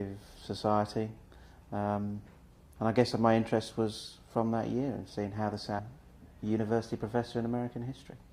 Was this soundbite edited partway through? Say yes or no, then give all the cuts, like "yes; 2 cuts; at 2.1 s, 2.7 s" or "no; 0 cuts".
no; 0 cuts